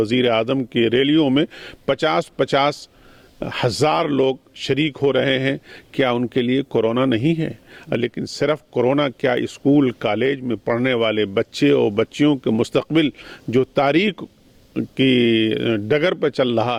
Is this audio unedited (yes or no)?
yes